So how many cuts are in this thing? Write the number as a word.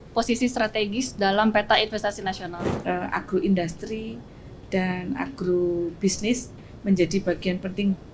one